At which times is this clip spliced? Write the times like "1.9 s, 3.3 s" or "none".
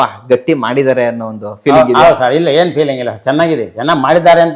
none